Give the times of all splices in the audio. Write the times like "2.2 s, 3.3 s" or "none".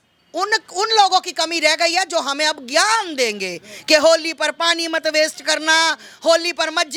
none